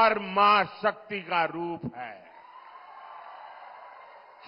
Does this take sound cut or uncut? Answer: uncut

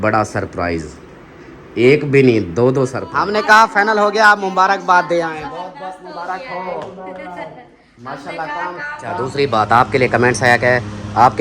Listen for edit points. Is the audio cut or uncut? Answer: cut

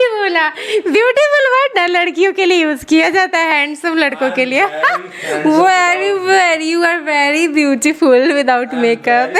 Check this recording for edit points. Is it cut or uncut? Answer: uncut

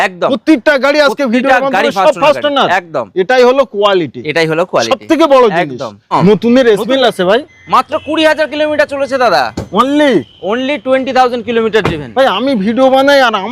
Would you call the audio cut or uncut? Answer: cut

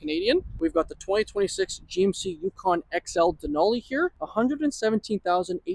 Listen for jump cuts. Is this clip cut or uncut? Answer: cut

